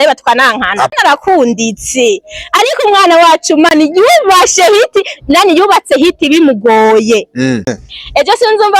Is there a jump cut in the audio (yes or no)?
yes